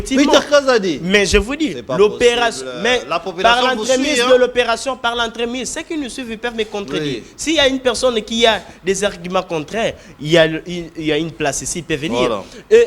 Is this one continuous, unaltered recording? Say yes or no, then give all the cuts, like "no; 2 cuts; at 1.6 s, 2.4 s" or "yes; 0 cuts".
yes; 0 cuts